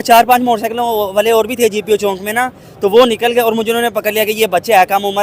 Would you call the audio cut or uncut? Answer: uncut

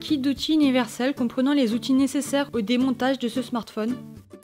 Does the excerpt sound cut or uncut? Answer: uncut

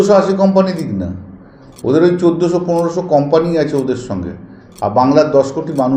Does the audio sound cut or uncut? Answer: uncut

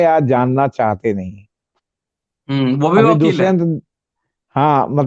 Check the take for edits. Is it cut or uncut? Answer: uncut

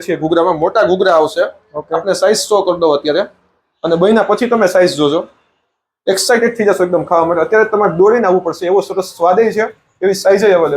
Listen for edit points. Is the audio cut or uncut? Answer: uncut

